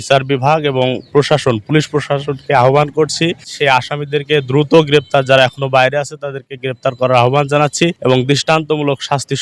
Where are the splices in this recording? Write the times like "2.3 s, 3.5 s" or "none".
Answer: 3.5 s, 8.0 s